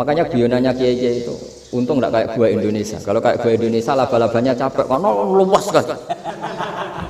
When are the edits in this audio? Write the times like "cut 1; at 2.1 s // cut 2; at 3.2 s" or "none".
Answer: none